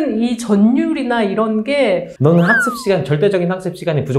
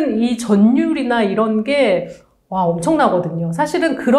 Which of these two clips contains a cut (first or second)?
first